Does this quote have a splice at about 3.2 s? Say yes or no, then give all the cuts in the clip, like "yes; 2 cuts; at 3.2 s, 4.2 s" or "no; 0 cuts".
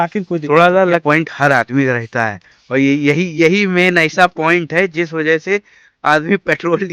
no; 1 cut; at 1.0 s